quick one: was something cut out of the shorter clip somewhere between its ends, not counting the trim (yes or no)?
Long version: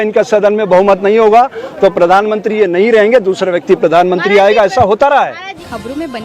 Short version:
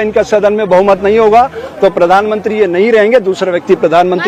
no